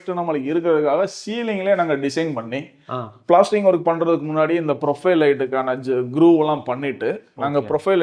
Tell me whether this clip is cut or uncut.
uncut